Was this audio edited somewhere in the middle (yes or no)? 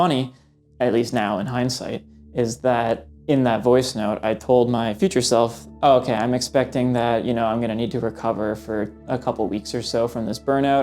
no